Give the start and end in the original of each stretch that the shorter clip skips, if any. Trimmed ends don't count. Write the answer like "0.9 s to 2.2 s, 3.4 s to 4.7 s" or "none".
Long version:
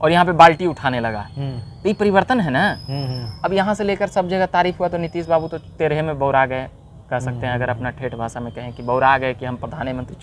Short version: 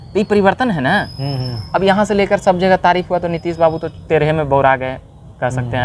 none

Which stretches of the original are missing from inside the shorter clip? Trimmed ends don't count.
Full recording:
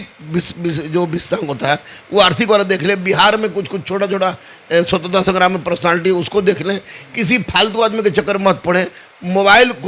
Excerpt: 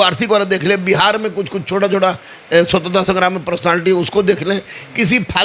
none

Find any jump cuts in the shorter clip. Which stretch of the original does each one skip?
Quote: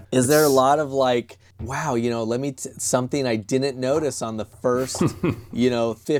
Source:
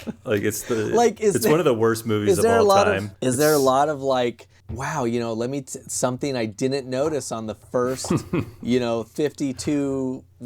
none

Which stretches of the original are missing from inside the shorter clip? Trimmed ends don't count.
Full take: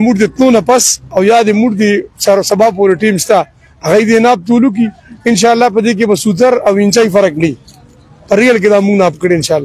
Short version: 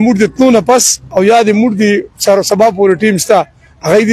none

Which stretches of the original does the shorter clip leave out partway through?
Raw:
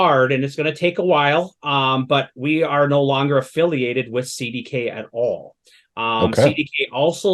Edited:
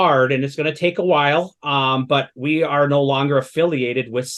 none

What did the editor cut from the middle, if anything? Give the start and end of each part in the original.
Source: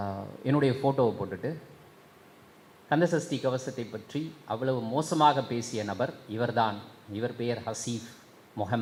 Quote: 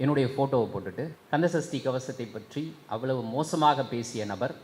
1.6 s to 2.8 s

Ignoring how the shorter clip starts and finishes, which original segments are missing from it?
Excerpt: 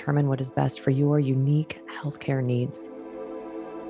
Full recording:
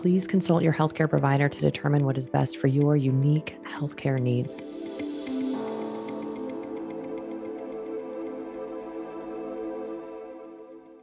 4.6 s to 8.2 s

